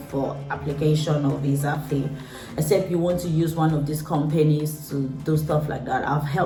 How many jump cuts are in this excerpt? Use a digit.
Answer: 0